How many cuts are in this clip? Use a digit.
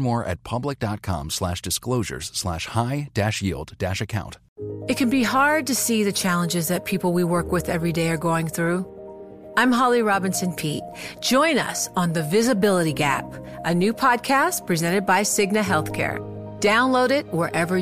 1